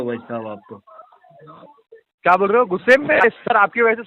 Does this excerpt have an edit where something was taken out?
no; 0 cuts

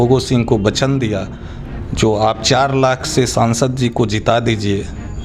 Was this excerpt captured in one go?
yes; 0 cuts

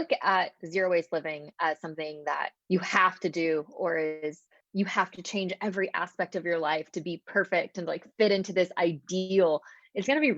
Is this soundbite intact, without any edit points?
no; 2 cuts; at 2.6 s, 4.5 s

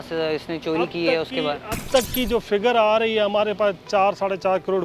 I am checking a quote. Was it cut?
no; 0 cuts

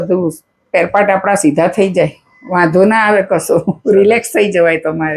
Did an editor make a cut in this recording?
no; 0 cuts

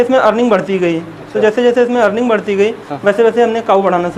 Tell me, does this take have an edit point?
no; 0 cuts

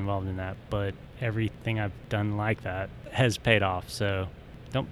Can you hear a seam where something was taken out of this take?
yes; 2 cuts; at 1.1 s, 3.2 s

